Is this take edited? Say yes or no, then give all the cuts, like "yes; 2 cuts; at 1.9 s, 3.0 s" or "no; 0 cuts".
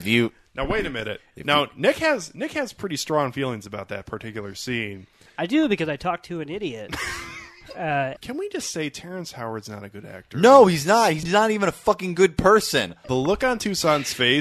yes; 3 cuts; at 8.2 s, 11.2 s, 13.0 s